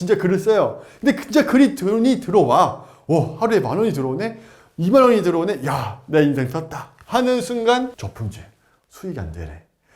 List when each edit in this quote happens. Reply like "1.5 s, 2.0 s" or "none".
8.0 s

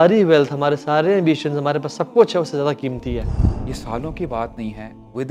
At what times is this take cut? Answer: 3.4 s

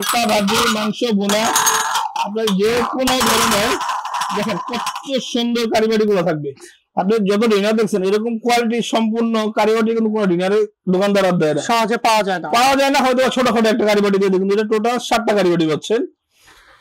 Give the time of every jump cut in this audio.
none

